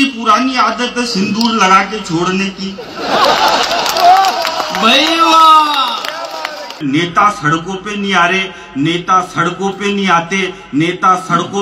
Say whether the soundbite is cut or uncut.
cut